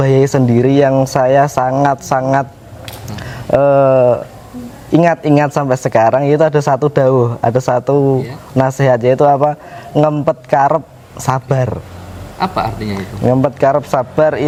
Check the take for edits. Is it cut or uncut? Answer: uncut